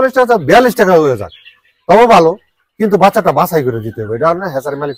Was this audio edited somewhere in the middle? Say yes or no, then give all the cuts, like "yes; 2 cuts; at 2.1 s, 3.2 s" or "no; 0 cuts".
no; 0 cuts